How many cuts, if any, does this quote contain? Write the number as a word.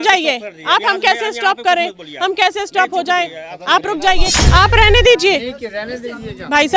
one